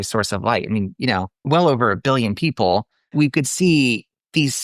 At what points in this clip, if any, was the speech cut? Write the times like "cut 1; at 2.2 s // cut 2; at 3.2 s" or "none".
cut 1; at 1.4 s // cut 2; at 3.1 s